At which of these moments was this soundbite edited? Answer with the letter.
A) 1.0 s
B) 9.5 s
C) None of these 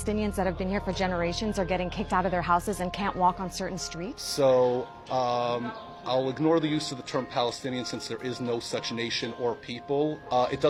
C